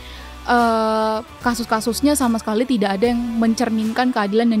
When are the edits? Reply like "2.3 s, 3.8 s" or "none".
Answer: none